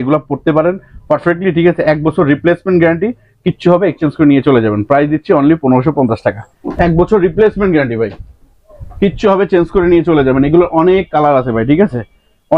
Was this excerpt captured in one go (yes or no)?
yes